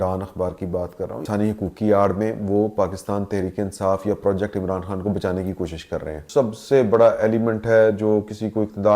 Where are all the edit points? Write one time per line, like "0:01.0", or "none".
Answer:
0:01.3
0:06.2